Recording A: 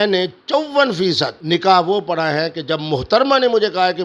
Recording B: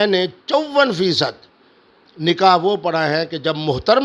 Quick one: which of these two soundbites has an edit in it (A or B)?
A